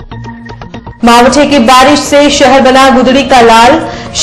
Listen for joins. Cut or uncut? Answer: cut